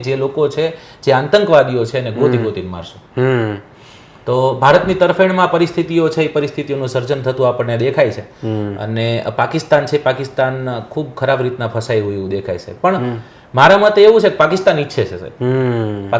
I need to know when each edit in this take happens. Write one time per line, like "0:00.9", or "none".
none

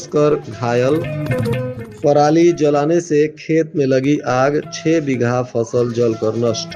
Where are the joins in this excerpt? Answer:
none

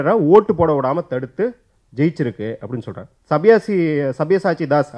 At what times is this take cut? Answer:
none

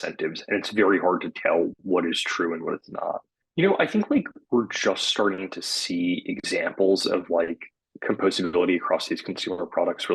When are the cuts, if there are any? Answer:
0:03.3

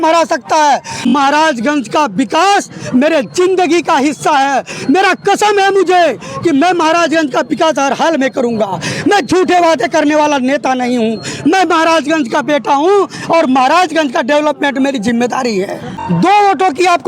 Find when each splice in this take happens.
0:01.1
0:15.9

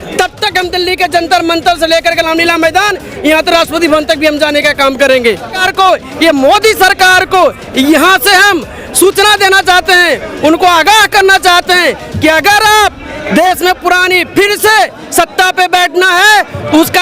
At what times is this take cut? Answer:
0:05.5

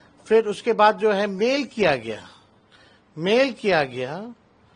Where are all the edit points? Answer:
none

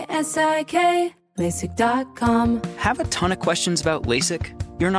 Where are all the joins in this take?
0:02.5

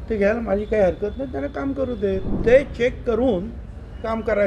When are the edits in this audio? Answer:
0:02.3

